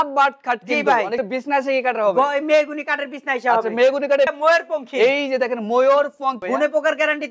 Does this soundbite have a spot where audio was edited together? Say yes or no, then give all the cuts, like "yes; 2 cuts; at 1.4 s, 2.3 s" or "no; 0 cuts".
yes; 3 cuts; at 1.3 s, 4.3 s, 6.4 s